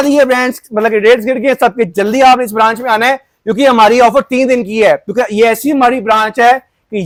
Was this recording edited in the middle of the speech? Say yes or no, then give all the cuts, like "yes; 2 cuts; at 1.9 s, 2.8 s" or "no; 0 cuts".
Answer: no; 0 cuts